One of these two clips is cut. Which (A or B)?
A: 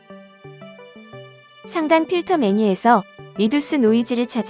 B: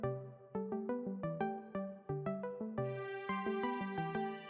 A